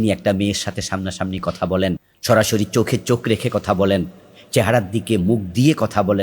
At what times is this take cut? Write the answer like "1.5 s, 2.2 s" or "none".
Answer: 2.1 s